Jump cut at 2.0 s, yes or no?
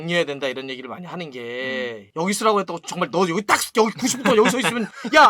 yes